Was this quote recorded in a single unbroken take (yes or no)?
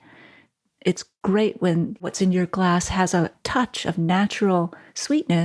no